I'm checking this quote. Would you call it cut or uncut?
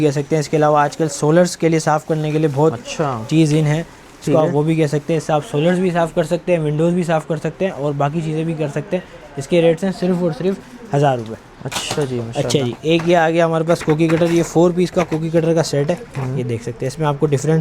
uncut